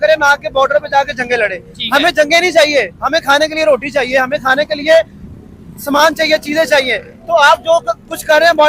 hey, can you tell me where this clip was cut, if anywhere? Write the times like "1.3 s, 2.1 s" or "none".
none